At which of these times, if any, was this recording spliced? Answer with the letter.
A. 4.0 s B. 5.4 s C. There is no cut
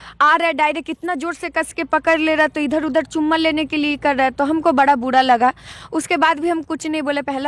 C